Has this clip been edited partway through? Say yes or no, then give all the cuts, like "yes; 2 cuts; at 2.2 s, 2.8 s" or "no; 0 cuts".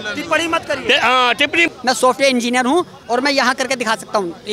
yes; 1 cut; at 1.7 s